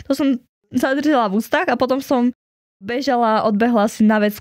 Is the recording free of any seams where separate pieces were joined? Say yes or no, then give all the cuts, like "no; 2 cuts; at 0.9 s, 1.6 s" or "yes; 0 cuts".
no; 1 cut; at 2.8 s